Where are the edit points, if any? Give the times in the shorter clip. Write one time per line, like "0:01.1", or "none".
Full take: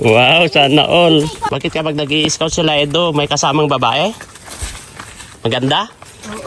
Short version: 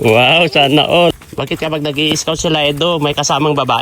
0:01.1